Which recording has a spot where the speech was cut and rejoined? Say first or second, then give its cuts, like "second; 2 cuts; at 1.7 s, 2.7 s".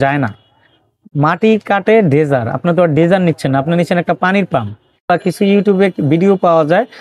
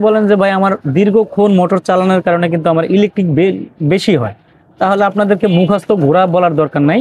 first; 1 cut; at 5.1 s